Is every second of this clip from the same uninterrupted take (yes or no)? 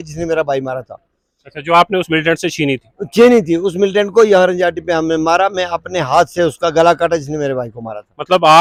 yes